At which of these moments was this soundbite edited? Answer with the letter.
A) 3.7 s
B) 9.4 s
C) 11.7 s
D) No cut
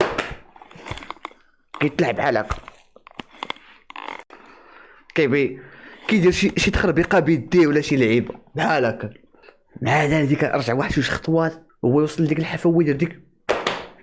C